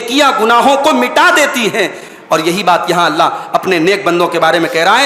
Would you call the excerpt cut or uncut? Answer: uncut